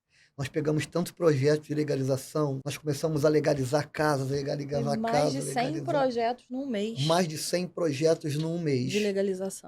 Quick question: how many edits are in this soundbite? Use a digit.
1